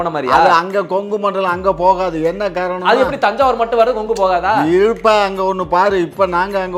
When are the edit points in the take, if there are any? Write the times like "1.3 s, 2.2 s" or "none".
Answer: none